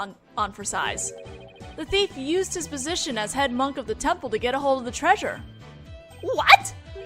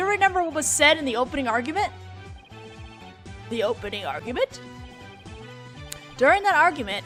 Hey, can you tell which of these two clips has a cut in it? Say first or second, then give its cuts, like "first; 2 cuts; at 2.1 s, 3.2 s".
first; 1 cut; at 5.2 s